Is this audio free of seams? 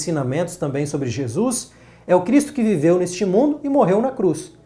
yes; 0 cuts

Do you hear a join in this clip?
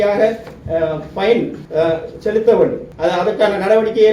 yes; 2 cuts; at 1.6 s, 2.9 s

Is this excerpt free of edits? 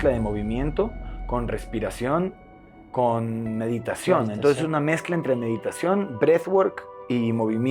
yes; 0 cuts

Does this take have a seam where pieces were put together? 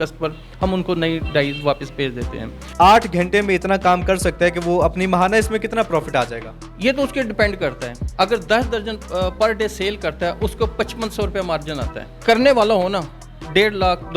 yes; 2 cuts; at 2.7 s, 12.2 s

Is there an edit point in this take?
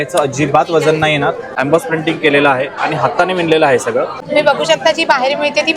yes; 2 cuts; at 1.5 s, 4.2 s

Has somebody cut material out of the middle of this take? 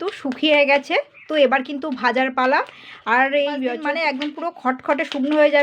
yes; 1 cut; at 3.8 s

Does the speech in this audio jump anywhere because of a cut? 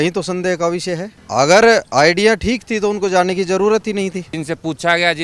yes; 2 cuts; at 1.1 s, 4.3 s

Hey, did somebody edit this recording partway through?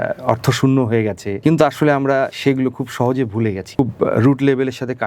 yes; 3 cuts; at 1.3 s, 2.3 s, 3.8 s

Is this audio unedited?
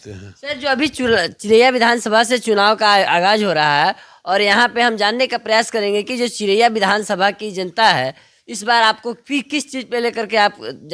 yes; 0 cuts

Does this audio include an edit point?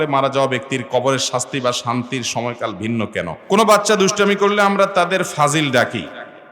yes; 1 cut; at 3.4 s

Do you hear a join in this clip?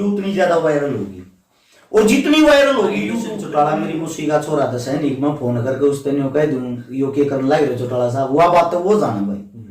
yes; 1 cut; at 3.4 s

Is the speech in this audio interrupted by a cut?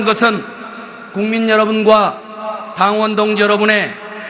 yes; 1 cut; at 1.4 s

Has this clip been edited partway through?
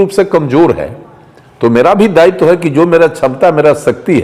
no; 0 cuts

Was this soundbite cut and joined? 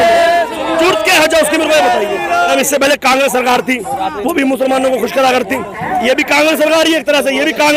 yes; 1 cut; at 2.5 s

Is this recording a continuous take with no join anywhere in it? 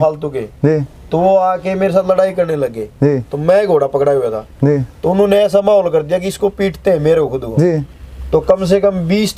yes; 0 cuts

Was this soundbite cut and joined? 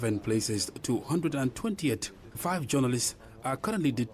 no; 0 cuts

